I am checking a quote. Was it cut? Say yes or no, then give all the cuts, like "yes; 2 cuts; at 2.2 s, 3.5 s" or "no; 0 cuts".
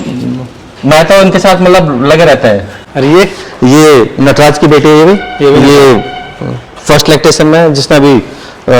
yes; 1 cut; at 2.8 s